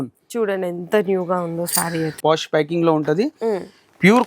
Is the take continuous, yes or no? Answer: no